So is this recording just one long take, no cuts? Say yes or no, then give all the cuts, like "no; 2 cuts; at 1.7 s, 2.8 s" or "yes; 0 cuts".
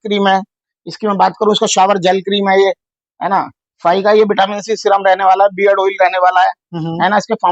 yes; 0 cuts